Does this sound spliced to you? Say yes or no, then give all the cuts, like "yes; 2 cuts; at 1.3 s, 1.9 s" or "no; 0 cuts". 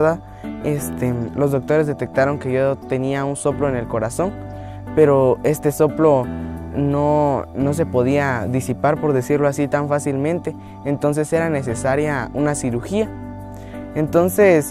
yes; 1 cut; at 5.1 s